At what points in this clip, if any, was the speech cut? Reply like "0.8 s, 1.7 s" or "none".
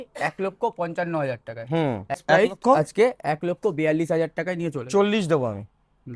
2.2 s